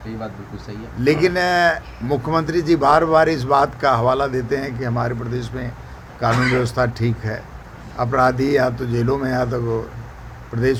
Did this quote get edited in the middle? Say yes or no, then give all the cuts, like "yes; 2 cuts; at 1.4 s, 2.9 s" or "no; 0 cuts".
no; 0 cuts